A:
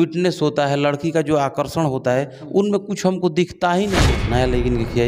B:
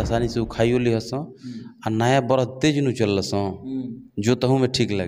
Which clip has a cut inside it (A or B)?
A